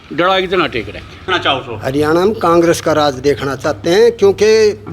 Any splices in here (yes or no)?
yes